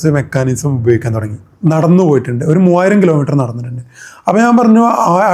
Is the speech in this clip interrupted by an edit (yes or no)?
yes